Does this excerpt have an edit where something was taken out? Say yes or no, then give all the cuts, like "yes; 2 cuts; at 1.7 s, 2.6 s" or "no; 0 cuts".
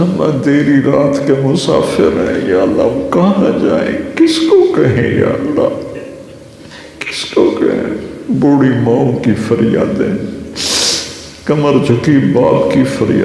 no; 0 cuts